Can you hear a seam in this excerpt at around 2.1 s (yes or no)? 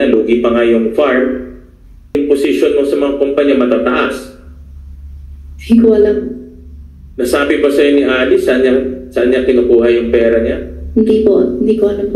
yes